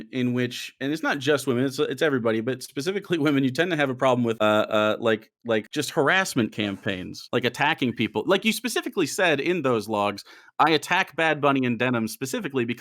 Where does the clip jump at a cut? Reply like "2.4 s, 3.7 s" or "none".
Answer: 4.4 s, 5.7 s, 7.1 s